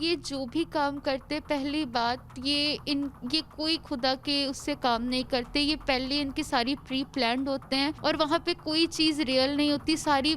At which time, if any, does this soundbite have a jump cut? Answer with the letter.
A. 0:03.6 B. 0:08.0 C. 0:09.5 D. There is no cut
B